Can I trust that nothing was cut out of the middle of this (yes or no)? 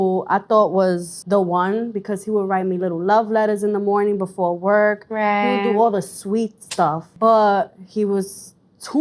no